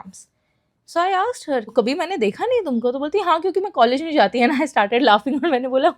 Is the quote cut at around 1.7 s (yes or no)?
yes